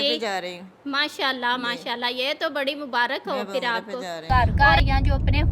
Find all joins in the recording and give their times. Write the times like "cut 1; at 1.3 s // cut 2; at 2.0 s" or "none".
cut 1; at 4.2 s